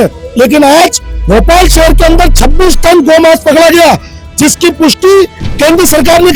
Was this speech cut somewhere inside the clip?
no; 0 cuts

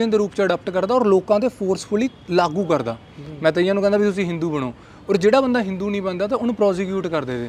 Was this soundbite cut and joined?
no; 0 cuts

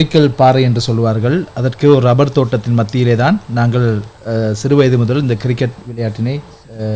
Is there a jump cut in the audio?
no; 0 cuts

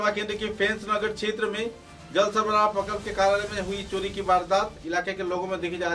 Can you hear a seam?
no; 0 cuts

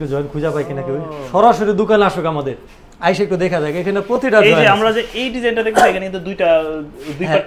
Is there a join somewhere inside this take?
no; 0 cuts

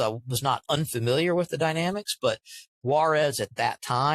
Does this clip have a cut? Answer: yes; 1 cut; at 2.7 s

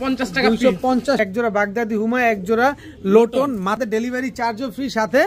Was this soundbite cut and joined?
yes; 2 cuts; at 1.2 s, 3.8 s

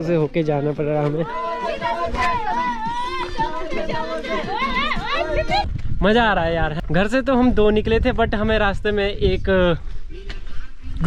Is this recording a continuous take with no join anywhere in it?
no; 2 cuts; at 5.8 s, 6.7 s

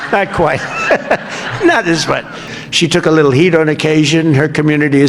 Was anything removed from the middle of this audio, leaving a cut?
yes; 1 cut; at 2.5 s

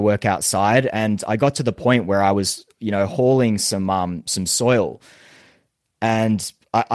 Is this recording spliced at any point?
no; 0 cuts

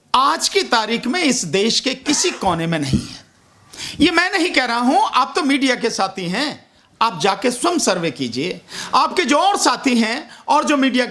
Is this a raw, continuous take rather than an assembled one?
yes; 0 cuts

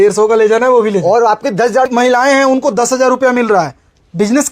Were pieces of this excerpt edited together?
yes; 1 cut; at 1.9 s

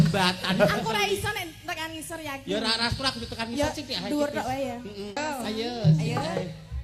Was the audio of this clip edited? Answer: yes; 1 cut; at 5.2 s

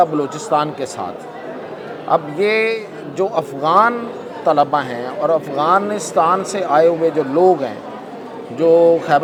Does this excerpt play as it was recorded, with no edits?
yes; 0 cuts

